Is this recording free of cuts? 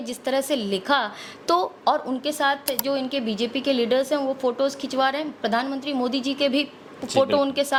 yes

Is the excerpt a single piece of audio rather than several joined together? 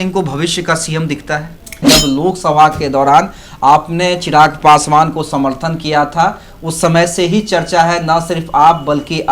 no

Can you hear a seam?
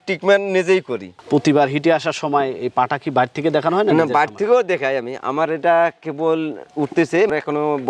no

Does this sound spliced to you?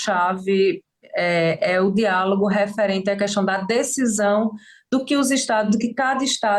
no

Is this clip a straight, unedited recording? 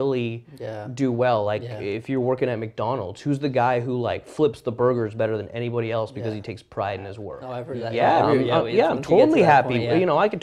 no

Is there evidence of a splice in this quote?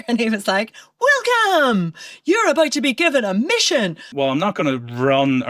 yes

